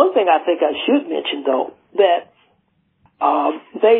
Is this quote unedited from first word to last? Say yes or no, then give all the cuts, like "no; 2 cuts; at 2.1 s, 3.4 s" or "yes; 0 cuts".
yes; 0 cuts